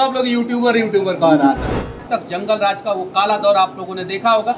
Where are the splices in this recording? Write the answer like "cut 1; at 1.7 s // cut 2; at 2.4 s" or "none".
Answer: cut 1; at 2.0 s